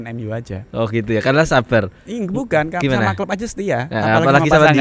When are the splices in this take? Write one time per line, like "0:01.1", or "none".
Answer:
none